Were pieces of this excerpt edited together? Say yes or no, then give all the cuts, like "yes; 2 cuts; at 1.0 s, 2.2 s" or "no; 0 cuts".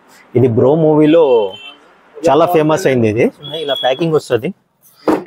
yes; 1 cut; at 3.5 s